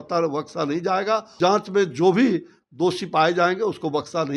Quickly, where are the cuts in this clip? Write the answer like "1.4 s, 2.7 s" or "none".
1.3 s

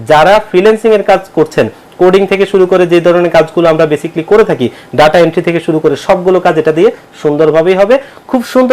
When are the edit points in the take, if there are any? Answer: none

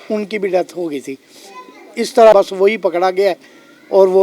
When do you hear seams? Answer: 2.3 s

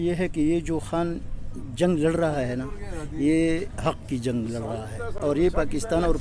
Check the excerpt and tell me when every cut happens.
none

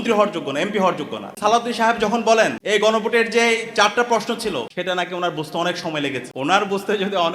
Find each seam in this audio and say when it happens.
1.2 s, 2.6 s, 4.7 s, 6.3 s

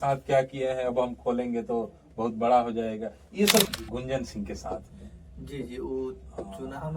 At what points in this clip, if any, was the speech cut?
3.7 s

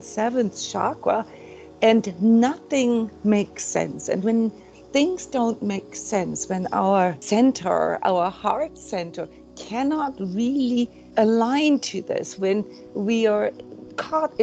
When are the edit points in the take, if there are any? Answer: 7.2 s, 11.0 s

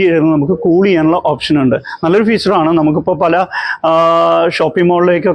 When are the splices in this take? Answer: none

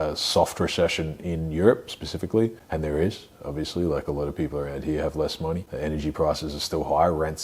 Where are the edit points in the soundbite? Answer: 2.6 s, 5.7 s

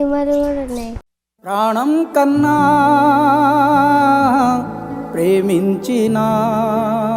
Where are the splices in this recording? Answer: 0.9 s

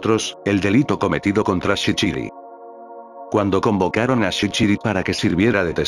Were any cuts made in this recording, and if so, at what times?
none

